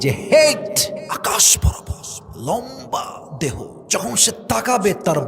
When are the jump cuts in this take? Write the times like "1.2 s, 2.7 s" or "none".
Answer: 1.1 s, 3.8 s